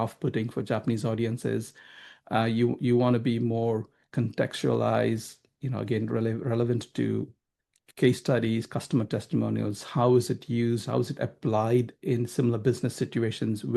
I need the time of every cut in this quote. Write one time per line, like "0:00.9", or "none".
none